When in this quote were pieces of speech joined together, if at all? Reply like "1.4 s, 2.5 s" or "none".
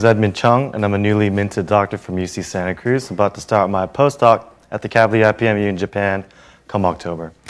none